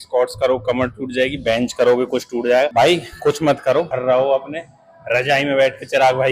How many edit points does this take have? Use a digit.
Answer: 2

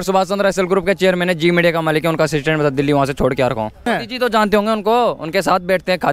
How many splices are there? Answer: 1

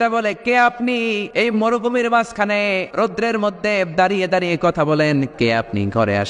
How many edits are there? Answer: 3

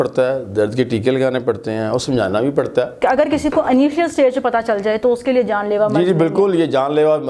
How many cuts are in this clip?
1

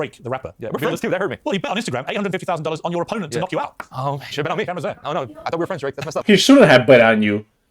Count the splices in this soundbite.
2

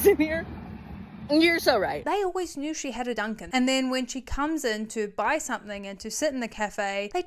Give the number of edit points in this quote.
2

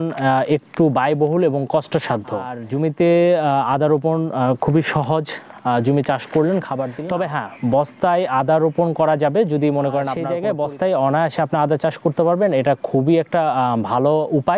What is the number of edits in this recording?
3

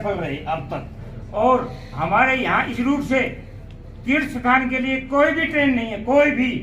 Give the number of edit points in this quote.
1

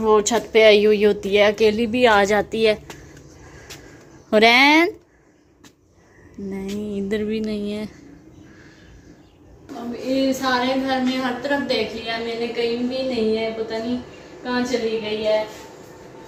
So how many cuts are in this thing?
0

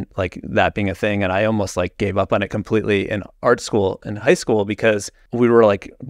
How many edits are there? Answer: 1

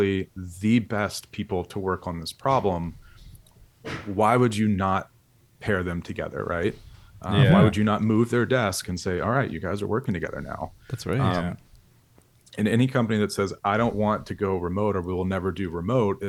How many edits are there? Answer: 0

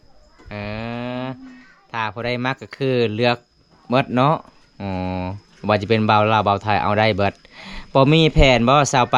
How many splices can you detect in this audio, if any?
0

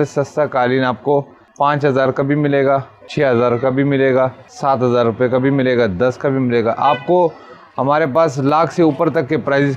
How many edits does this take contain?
3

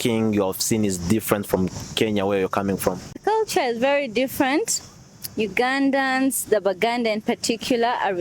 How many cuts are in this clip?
1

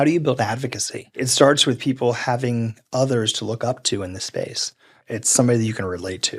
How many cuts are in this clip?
1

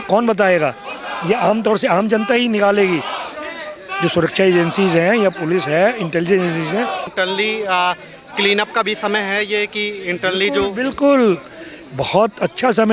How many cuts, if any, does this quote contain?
1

